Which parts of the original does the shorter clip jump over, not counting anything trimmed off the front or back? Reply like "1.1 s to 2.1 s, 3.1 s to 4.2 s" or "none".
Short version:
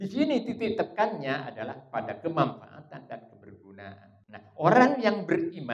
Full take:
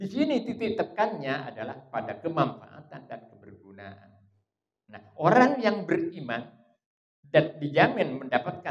4.1 s to 4.7 s